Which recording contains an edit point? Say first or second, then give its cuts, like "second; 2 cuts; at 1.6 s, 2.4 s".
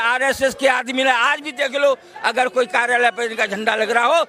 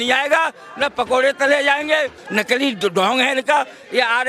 second; 1 cut; at 2.2 s